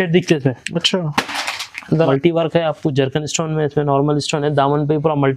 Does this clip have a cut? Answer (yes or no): yes